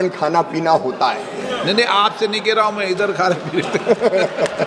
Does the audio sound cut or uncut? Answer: uncut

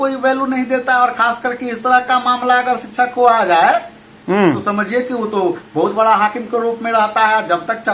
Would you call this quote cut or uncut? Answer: uncut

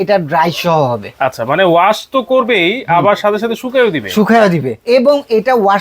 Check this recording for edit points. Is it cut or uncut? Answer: cut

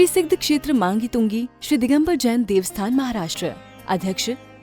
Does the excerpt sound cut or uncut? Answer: uncut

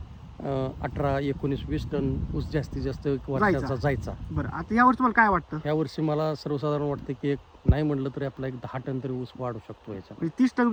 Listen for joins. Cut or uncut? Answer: uncut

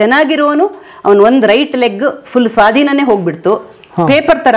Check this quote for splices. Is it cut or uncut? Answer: uncut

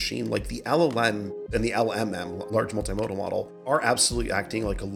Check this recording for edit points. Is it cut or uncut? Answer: cut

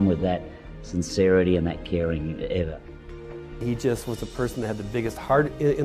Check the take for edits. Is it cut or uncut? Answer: cut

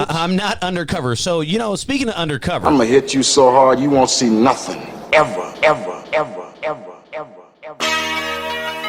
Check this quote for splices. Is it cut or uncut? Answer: cut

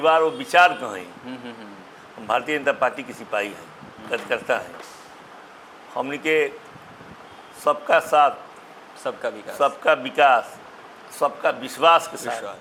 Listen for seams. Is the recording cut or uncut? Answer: uncut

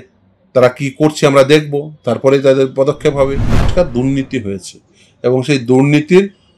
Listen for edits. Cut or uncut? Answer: cut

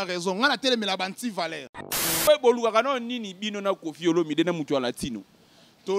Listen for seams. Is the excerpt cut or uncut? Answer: cut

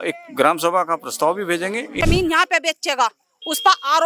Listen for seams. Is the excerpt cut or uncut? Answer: cut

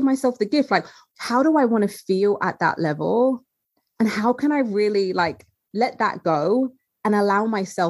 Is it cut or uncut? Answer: cut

